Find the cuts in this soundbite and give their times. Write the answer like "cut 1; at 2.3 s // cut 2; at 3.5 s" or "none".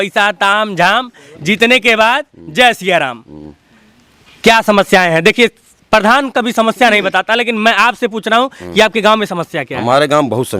none

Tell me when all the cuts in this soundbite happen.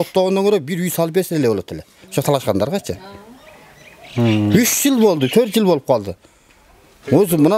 none

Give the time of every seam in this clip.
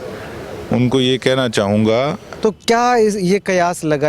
cut 1; at 2.3 s

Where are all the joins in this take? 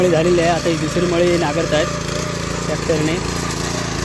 none

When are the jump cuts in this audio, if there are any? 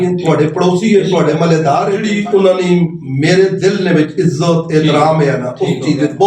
cut 1; at 2.0 s

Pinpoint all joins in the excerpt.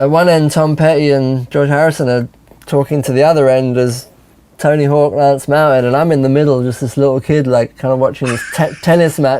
cut 1; at 1.5 s

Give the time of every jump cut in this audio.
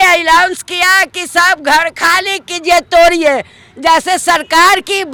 none

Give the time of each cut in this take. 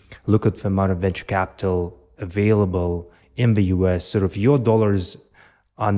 none

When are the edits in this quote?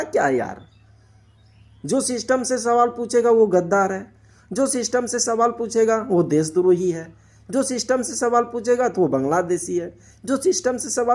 none

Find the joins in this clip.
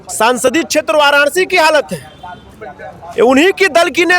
none

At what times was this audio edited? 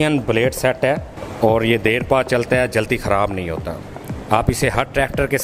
cut 1; at 1.2 s

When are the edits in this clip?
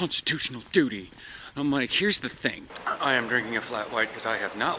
cut 1; at 2.7 s

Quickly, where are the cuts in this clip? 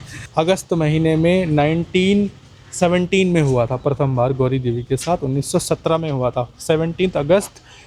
none

